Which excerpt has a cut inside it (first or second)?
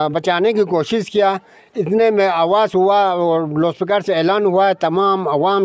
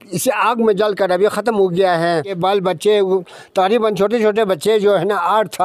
second